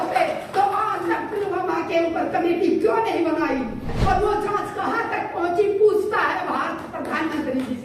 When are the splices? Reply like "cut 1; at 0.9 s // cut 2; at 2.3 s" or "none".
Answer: cut 1; at 3.9 s